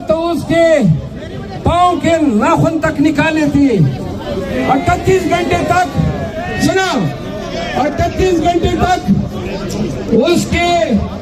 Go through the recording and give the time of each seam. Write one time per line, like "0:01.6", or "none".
none